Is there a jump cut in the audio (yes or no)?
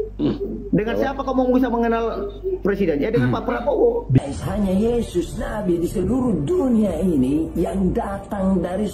yes